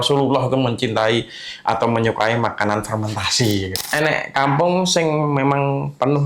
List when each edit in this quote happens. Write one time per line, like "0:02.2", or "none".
0:03.7

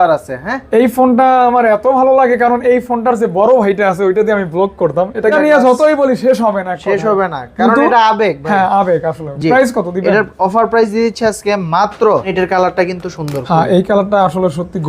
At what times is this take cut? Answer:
0:05.3
0:12.3

